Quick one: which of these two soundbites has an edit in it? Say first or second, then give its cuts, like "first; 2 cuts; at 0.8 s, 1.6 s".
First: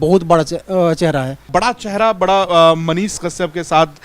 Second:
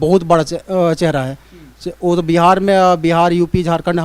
first; 1 cut; at 1.5 s